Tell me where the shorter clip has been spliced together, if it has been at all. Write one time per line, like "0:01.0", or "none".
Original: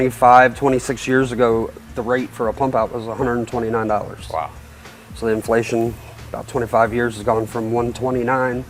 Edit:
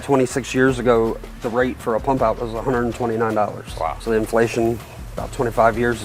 0:04.0